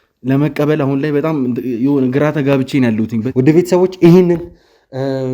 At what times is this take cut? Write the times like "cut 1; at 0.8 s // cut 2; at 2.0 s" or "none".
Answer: cut 1; at 3.2 s